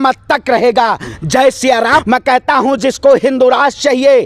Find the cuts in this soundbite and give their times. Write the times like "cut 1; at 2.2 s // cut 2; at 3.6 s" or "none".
cut 1; at 2.0 s